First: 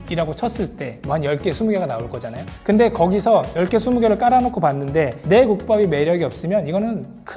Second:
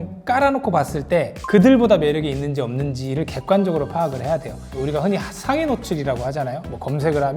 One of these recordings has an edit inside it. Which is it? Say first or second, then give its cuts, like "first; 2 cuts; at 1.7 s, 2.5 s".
second; 1 cut; at 4.7 s